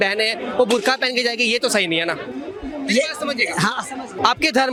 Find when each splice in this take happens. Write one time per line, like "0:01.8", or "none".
none